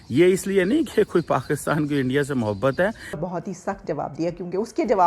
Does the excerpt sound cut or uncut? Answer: cut